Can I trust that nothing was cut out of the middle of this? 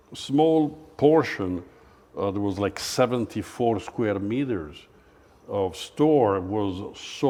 yes; 0 cuts

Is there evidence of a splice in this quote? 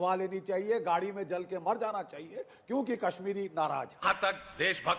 yes; 1 cut; at 3.9 s

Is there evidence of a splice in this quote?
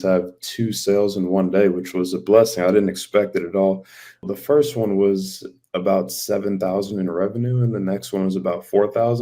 yes; 1 cut; at 4.3 s

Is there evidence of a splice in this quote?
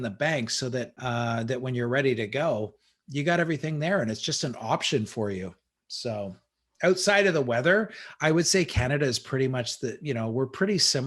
yes; 1 cut; at 0.9 s

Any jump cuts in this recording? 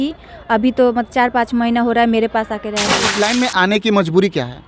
yes; 1 cut; at 3.0 s

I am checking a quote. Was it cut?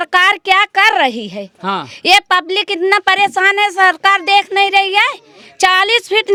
no; 0 cuts

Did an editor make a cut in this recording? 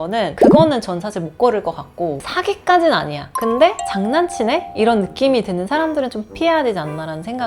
yes; 1 cut; at 2.2 s

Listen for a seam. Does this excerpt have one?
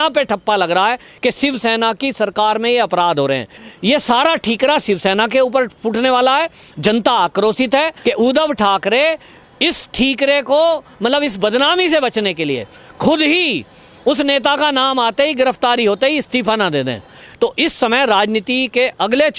yes; 3 cuts; at 3.6 s, 7.9 s, 17.2 s

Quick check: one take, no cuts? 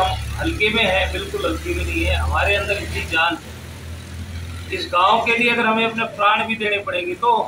yes; 0 cuts

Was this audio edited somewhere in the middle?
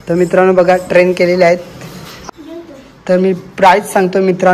yes; 1 cut; at 2.1 s

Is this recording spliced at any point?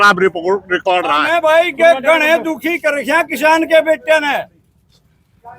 yes; 1 cut; at 1.2 s

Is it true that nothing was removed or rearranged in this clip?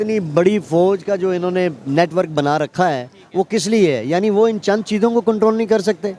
yes; 0 cuts

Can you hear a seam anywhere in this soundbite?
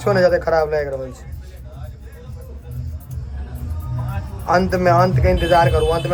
no; 0 cuts

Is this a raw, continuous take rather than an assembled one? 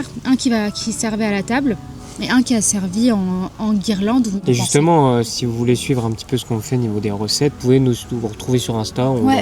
no; 2 cuts; at 4.4 s, 7.6 s

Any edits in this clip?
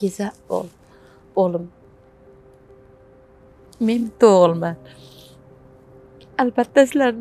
no; 0 cuts

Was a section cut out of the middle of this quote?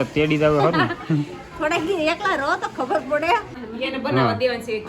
yes; 1 cut; at 3.5 s

